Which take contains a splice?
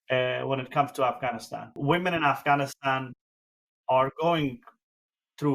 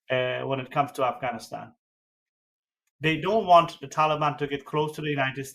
first; 1 cut; at 1.6 s

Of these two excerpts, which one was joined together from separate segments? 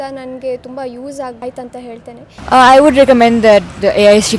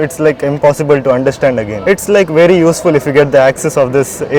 first; 1 cut; at 2.3 s

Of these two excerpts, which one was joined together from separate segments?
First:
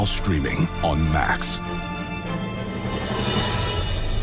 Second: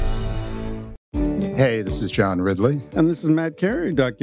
second; 1 cut; at 0.9 s

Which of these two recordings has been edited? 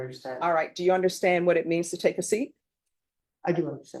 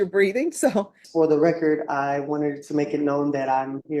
second; 1 cut; at 1.0 s

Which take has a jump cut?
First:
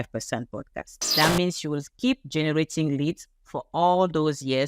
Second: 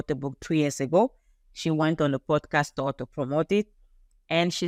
first; 1 cut; at 1.1 s

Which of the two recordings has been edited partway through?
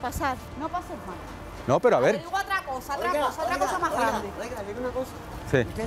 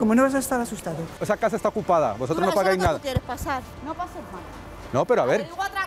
second; 1 cut; at 1.2 s

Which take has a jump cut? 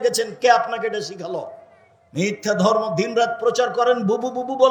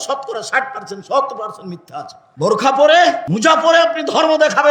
second; 2 cuts; at 2.2 s, 3.3 s

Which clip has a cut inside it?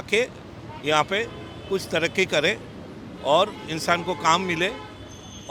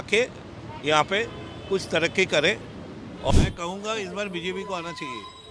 second; 1 cut; at 3.3 s

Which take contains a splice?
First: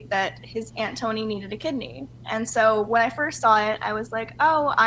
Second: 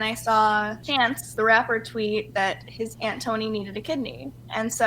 second; 1 cut; at 1.0 s

